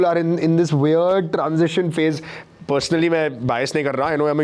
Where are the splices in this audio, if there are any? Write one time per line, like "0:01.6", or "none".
none